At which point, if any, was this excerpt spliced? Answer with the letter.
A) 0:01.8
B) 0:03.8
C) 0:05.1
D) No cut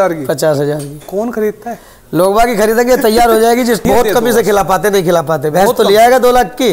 B